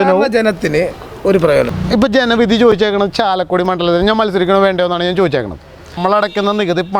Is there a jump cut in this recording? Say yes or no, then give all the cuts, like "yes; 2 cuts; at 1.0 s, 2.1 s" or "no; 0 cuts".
yes; 2 cuts; at 1.7 s, 5.9 s